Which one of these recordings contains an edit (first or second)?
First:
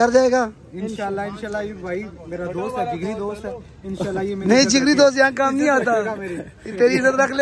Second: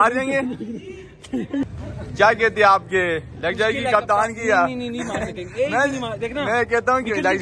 second